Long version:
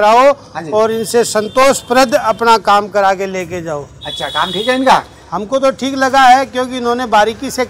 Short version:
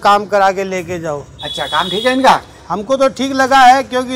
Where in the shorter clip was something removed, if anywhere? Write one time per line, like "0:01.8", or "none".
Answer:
none